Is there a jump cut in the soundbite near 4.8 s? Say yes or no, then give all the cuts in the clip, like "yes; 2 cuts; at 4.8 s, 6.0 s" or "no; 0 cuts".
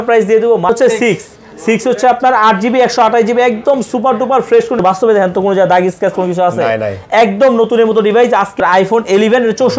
yes; 3 cuts; at 0.7 s, 4.8 s, 8.6 s